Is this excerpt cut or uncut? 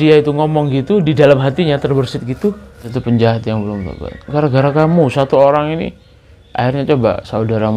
cut